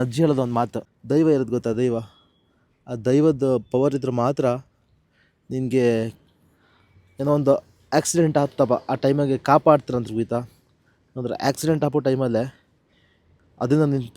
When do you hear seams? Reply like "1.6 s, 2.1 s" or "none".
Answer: 0.9 s